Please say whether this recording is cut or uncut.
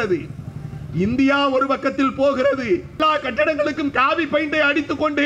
cut